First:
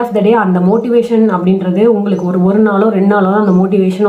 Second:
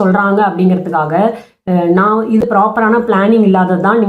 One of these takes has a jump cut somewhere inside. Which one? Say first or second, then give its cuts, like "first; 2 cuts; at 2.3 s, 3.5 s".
second; 1 cut; at 2.4 s